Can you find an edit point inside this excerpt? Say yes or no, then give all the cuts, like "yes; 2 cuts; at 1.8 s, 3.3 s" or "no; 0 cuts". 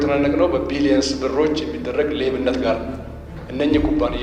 yes; 1 cut; at 3.3 s